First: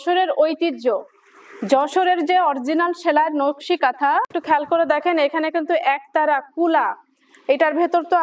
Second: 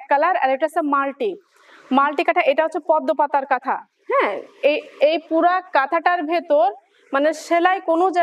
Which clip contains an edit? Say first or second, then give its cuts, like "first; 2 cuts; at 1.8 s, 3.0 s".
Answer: first; 1 cut; at 4.3 s